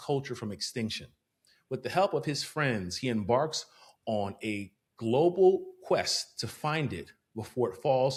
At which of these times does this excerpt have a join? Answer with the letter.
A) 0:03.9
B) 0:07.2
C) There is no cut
C